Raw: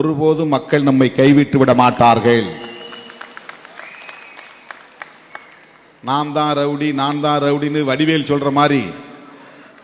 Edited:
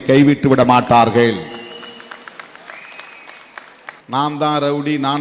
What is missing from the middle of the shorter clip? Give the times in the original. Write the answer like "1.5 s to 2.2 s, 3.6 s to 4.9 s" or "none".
4.6 s to 5.5 s